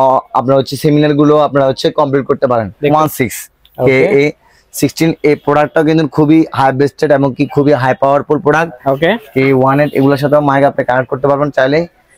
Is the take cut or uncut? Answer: cut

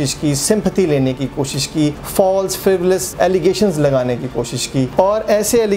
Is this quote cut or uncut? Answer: cut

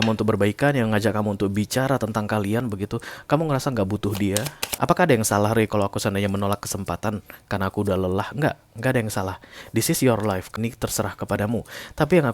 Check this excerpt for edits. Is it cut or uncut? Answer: cut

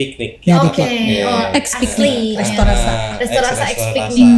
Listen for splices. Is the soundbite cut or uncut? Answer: uncut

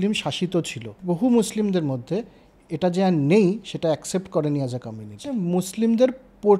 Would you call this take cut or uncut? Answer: cut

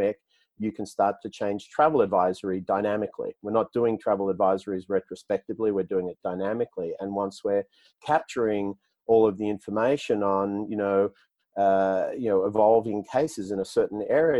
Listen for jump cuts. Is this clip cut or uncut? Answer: uncut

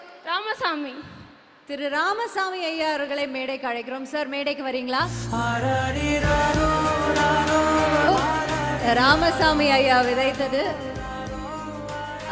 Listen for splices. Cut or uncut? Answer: uncut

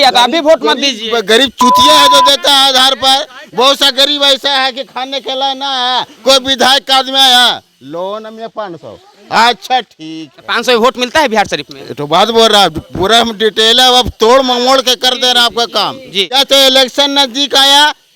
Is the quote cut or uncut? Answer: cut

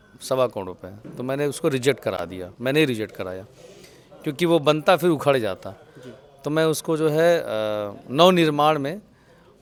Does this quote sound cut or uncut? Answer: uncut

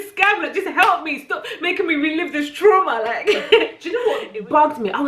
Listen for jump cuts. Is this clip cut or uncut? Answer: cut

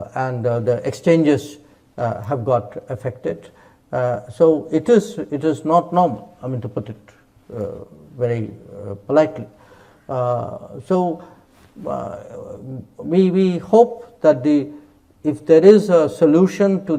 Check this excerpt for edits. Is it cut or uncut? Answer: uncut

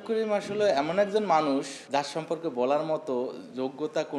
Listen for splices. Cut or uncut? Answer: uncut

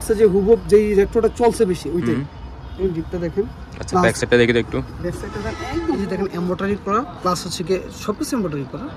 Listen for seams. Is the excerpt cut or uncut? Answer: cut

